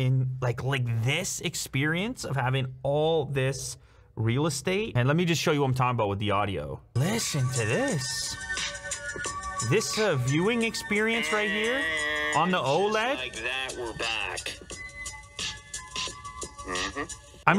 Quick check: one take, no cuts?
yes; 0 cuts

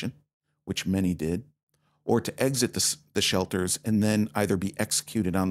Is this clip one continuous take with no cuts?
yes; 0 cuts

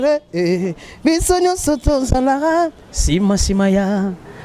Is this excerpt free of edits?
yes; 0 cuts

